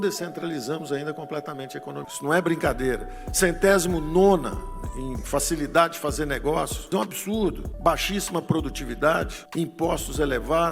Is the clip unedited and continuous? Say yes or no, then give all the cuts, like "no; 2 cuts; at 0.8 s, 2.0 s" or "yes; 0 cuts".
no; 1 cut; at 2.1 s